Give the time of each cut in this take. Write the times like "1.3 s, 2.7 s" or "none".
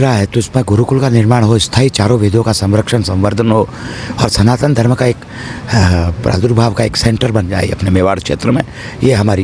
none